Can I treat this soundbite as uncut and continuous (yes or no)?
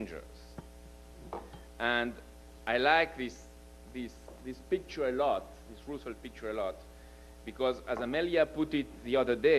no